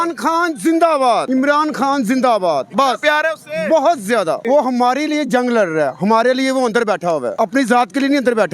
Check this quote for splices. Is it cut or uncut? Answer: cut